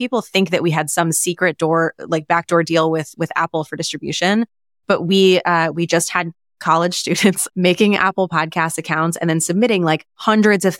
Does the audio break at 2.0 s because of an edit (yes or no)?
no